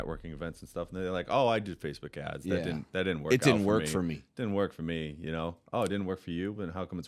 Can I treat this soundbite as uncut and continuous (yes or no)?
yes